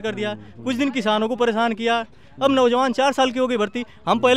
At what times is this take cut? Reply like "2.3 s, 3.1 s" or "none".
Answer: none